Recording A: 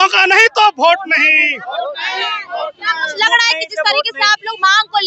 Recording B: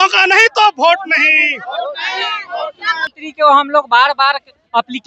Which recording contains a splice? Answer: B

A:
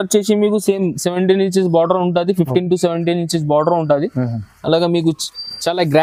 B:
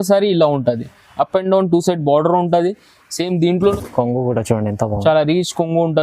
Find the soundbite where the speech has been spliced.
B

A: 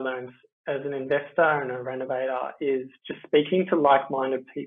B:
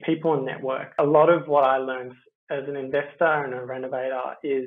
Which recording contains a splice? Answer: B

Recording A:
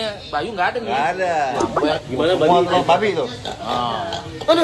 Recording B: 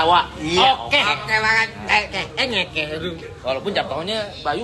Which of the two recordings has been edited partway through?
A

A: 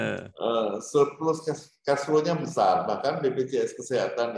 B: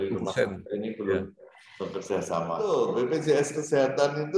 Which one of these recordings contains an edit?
B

